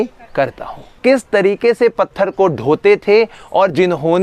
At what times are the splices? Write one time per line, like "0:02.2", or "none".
0:00.9